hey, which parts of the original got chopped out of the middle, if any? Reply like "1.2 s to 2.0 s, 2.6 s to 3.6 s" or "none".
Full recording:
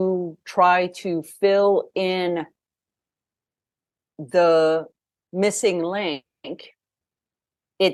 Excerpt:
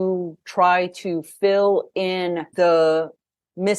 2.5 s to 4.2 s